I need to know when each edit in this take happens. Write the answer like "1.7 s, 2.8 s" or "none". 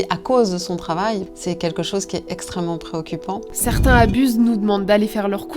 1.3 s, 3.5 s